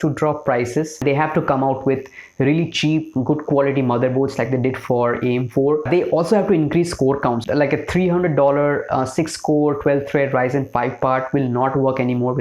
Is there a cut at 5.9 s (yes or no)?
yes